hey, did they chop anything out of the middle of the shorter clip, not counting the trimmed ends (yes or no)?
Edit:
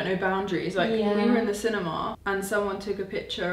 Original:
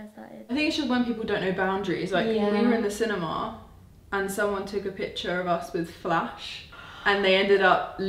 yes